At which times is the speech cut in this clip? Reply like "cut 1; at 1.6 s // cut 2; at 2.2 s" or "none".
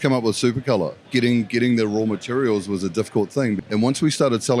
cut 1; at 1.0 s // cut 2; at 3.6 s

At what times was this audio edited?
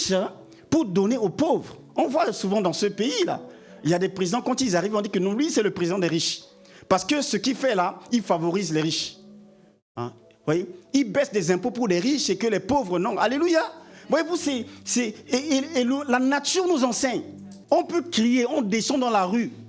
cut 1; at 17.5 s

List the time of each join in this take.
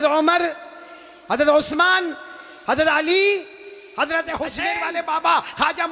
cut 1; at 4.7 s

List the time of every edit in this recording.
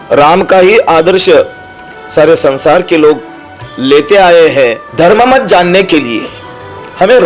cut 1; at 4.8 s

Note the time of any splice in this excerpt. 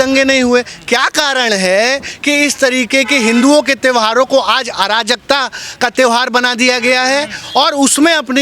none

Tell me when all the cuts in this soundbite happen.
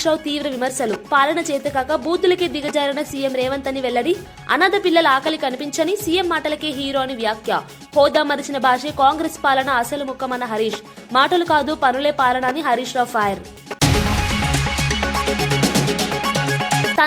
cut 1; at 13.6 s

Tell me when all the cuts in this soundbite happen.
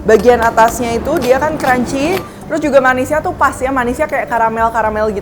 none

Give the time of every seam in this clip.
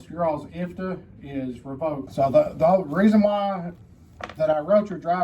cut 1; at 2.1 s

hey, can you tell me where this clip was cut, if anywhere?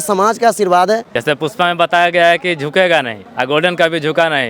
cut 1; at 1.1 s // cut 2; at 3.2 s

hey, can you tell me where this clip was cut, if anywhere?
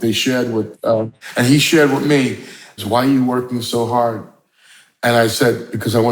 cut 1; at 1.2 s // cut 2; at 2.8 s

